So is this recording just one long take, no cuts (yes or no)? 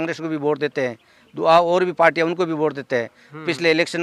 yes